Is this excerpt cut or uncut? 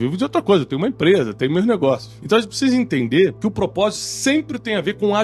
cut